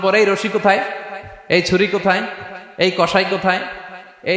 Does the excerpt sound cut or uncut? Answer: uncut